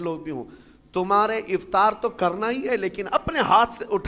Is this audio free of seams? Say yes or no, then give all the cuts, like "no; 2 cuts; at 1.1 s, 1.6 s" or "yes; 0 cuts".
yes; 0 cuts